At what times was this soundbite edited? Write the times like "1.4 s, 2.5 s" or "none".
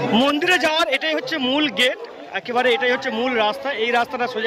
none